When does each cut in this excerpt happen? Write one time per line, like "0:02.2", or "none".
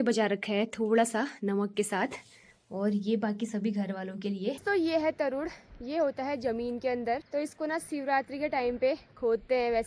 0:04.6
0:07.2